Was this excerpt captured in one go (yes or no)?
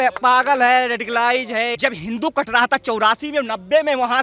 no